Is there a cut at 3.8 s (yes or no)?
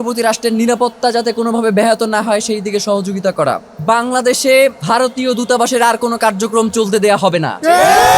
yes